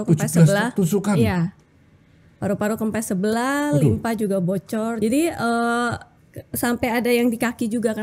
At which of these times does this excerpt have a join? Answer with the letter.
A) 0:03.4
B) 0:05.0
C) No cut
B